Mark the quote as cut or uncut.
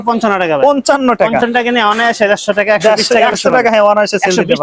uncut